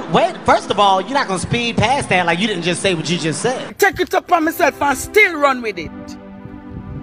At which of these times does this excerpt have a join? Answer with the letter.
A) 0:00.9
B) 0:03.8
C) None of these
B